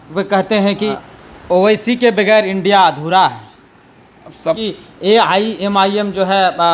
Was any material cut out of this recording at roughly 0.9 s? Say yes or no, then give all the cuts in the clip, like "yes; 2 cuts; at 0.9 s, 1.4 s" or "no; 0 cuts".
yes; 2 cuts; at 0.9 s, 4.4 s